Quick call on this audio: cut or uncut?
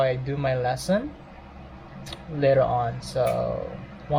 uncut